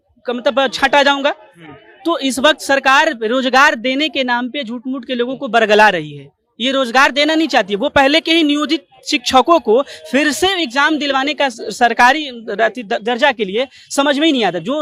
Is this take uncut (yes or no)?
yes